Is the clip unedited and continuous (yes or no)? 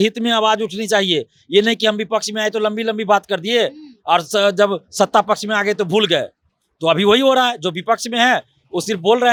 yes